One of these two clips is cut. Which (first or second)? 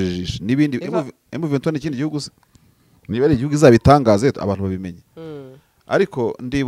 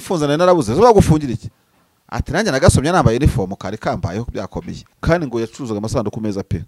second